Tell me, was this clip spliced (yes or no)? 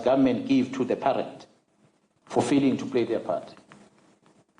no